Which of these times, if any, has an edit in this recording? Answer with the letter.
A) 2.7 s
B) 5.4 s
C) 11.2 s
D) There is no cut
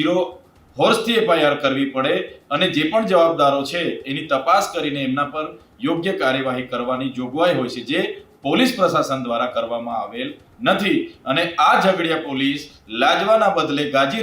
D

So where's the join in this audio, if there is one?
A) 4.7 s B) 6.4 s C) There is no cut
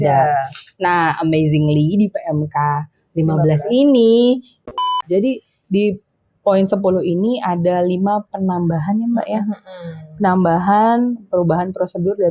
A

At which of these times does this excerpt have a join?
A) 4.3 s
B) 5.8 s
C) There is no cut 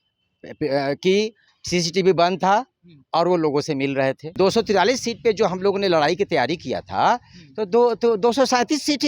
A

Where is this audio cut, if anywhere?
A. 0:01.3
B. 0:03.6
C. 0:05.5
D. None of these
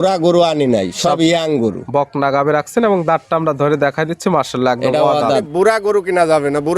C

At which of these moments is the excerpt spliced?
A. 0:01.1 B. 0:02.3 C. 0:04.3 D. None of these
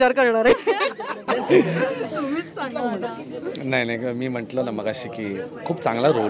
D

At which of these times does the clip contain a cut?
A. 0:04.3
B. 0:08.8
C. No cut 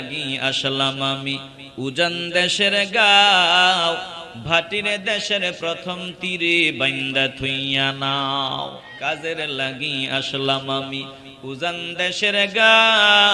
B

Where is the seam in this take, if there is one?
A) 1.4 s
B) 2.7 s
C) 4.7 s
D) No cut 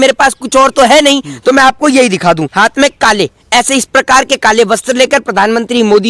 B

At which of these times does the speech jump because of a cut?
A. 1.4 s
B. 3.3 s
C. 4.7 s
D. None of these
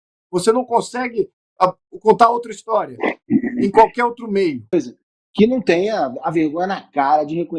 C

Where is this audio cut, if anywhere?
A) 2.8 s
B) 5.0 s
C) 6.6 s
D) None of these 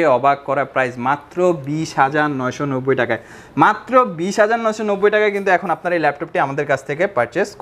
D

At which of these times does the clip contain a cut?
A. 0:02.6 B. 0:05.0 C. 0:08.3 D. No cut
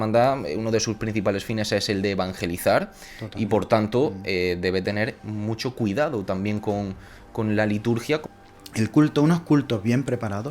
C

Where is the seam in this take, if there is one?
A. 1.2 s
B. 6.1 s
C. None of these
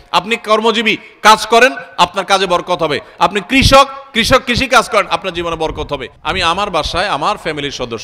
B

